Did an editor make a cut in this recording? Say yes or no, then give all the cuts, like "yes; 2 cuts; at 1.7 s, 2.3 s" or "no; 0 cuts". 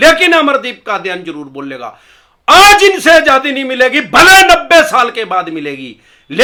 no; 0 cuts